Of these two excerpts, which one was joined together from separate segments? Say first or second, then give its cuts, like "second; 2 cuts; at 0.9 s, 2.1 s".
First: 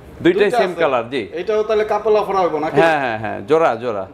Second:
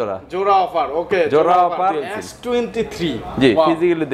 second; 1 cut; at 2.2 s